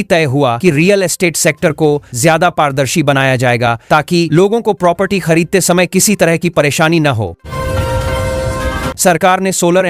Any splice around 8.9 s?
yes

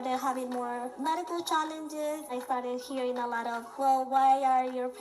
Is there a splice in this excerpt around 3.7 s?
yes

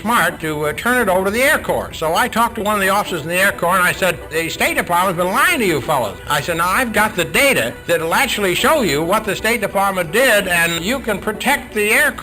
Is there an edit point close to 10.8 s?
yes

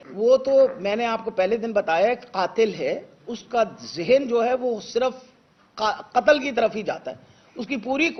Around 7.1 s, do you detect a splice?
no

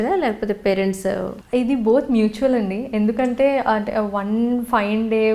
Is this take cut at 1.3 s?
yes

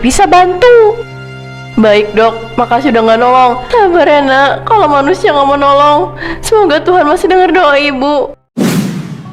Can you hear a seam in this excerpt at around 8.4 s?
yes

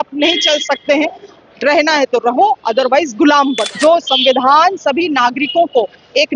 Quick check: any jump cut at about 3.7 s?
yes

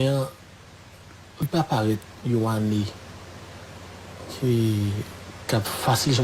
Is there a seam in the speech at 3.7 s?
no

